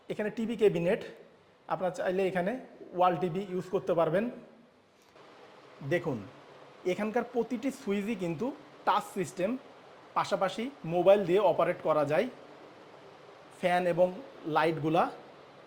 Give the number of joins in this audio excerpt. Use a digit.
1